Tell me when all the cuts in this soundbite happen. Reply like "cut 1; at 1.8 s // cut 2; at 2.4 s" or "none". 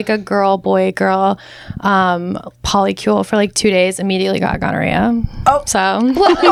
none